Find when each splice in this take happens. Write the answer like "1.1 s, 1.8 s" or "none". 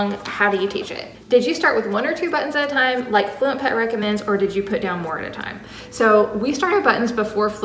1.0 s